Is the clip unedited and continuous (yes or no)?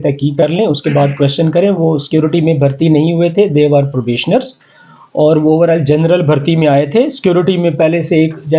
yes